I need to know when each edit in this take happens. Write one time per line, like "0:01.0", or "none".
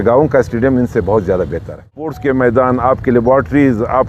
0:02.1